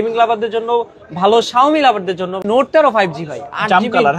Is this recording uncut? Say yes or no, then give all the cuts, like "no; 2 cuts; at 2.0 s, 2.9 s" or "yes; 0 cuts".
no; 1 cut; at 2.4 s